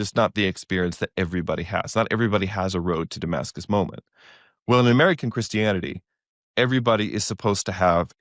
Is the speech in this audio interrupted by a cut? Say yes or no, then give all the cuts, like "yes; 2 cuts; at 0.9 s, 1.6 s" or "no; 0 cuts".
no; 0 cuts